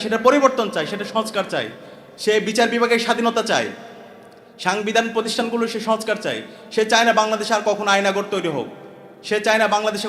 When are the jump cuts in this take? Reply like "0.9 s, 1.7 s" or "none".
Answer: none